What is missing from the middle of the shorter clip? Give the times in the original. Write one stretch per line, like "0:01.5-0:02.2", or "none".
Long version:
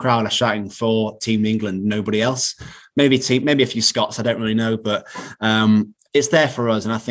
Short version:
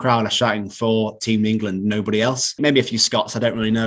0:02.6-0:03.4